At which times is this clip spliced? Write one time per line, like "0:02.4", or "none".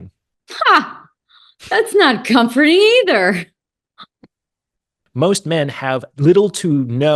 0:05.0
0:06.1